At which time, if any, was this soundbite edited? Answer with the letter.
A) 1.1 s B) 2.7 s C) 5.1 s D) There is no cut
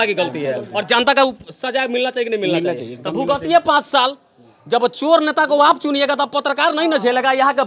D